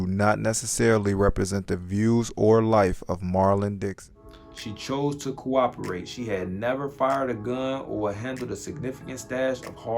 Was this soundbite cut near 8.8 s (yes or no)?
no